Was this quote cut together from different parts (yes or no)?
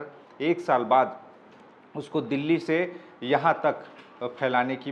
no